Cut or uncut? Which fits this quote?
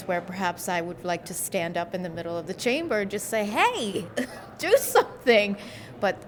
uncut